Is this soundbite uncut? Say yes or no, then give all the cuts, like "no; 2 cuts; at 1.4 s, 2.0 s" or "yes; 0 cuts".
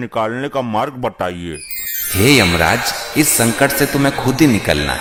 yes; 0 cuts